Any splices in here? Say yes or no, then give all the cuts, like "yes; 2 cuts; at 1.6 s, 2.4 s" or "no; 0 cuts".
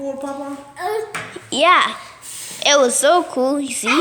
no; 0 cuts